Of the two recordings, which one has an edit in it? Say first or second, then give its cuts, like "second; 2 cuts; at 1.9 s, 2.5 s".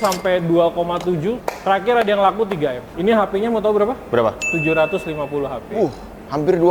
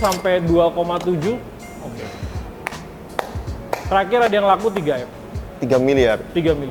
first; 2 cuts; at 1.5 s, 2.9 s